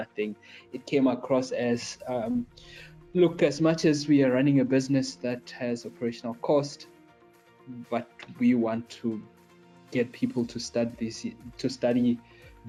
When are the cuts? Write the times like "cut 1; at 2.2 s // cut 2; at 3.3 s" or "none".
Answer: none